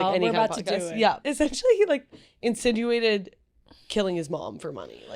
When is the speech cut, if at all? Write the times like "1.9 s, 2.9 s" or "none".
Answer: 1.2 s